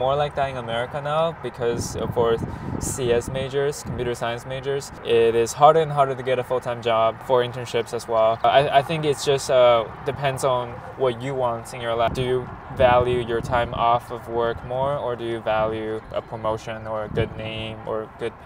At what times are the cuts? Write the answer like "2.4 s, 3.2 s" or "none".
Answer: none